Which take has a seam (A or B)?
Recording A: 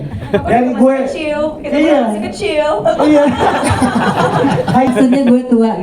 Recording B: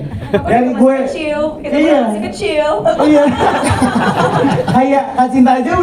A